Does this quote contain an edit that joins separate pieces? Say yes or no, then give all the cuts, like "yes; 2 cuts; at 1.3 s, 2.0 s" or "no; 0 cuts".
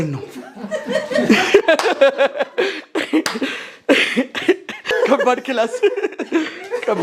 yes; 1 cut; at 4.9 s